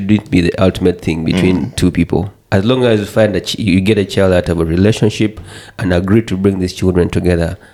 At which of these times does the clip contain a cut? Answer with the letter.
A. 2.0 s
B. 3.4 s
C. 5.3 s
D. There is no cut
D